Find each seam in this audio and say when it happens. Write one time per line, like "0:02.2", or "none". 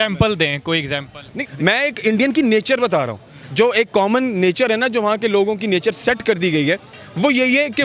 0:01.4